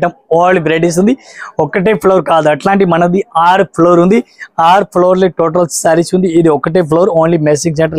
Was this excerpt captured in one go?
yes; 0 cuts

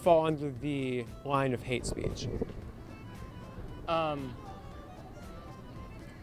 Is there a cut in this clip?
no; 0 cuts

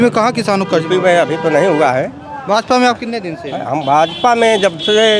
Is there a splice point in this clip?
no; 0 cuts

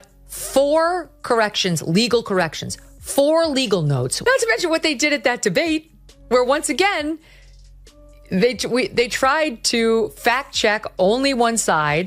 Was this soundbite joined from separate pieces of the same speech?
yes; 1 cut; at 4.1 s

